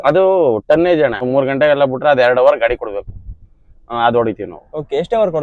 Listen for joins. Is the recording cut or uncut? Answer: cut